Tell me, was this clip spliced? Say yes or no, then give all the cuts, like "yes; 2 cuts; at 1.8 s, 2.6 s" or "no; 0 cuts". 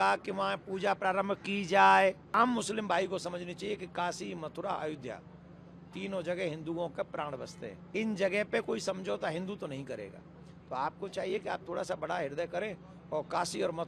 yes; 2 cuts; at 2.3 s, 7.8 s